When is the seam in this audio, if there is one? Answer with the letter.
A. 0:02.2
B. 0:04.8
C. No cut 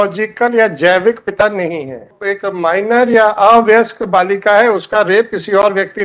A